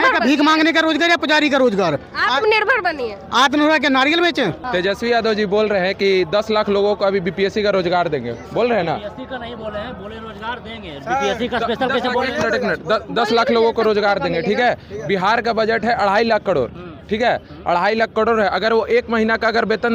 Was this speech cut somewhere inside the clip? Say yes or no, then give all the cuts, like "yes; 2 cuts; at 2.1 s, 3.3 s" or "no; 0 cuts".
yes; 1 cut; at 4.6 s